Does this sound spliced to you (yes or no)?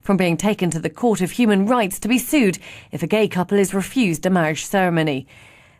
yes